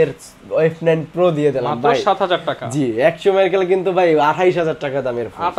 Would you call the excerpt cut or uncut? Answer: uncut